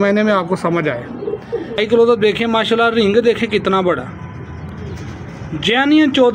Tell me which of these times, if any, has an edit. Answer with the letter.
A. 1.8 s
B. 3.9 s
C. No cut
A